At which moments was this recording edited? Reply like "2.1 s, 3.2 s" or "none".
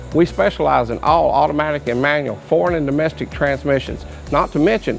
none

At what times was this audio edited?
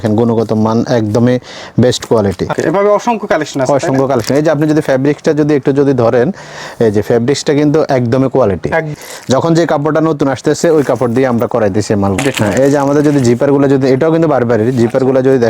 2.6 s, 8.9 s, 12.2 s

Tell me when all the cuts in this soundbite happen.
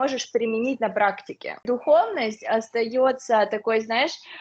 1.6 s

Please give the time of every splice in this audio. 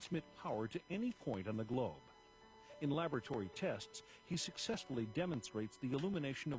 none

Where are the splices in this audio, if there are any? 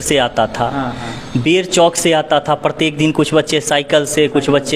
none

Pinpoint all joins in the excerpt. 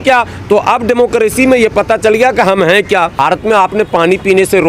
3.1 s

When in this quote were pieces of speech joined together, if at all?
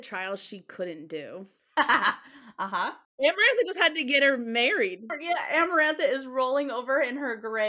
1.5 s, 3.0 s

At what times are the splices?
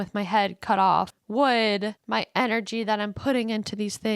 1.2 s, 2.0 s

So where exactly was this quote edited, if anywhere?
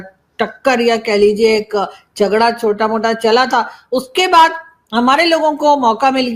none

